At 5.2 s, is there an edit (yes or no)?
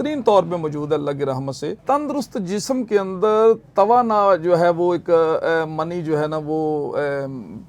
no